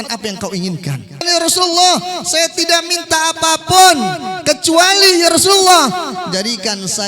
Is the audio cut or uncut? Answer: cut